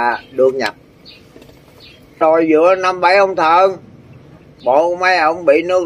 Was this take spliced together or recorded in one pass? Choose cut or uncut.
cut